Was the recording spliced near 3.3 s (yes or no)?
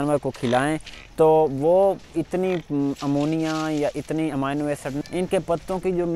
no